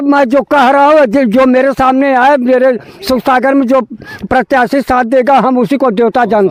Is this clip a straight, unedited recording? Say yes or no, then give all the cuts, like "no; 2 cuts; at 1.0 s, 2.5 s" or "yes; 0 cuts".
yes; 0 cuts